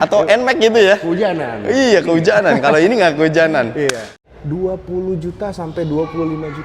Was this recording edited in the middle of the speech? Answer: yes; 1 cut; at 4.1 s

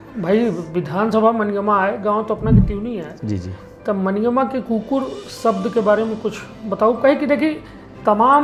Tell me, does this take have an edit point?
no; 0 cuts

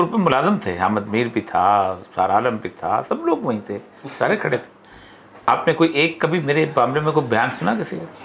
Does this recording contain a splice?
no; 0 cuts

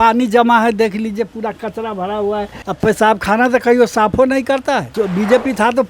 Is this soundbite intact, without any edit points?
no; 2 cuts; at 2.6 s, 4.9 s

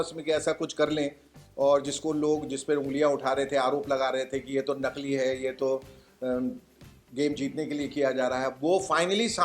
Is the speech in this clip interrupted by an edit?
yes; 1 cut; at 1.4 s

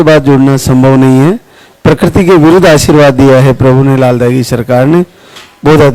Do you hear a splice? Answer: no; 0 cuts

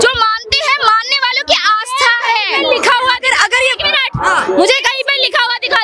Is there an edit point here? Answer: no; 0 cuts

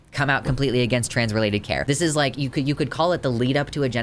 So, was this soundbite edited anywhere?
yes; 1 cut; at 1.8 s

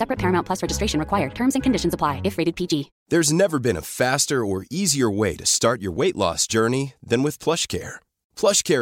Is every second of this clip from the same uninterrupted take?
yes; 0 cuts

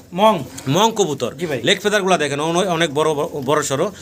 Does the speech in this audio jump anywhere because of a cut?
no; 0 cuts

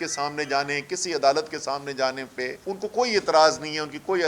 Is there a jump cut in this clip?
yes; 1 cut; at 2.6 s

